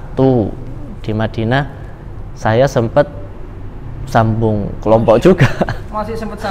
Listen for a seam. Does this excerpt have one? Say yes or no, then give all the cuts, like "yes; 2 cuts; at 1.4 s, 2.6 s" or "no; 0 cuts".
no; 0 cuts